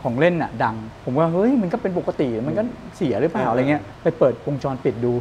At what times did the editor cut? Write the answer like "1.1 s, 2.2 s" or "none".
0.9 s, 3.9 s